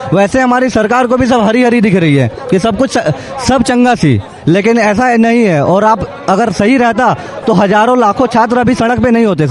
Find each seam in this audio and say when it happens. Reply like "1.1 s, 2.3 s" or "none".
none